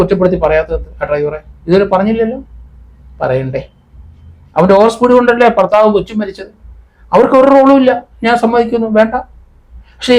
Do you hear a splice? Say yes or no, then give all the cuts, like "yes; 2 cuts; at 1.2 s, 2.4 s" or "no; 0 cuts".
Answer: no; 0 cuts